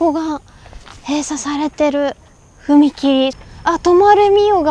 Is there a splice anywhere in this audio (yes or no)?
yes